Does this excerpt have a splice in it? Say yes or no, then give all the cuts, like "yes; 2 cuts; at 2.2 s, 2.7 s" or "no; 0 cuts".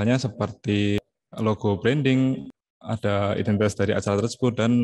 yes; 2 cuts; at 1.0 s, 2.5 s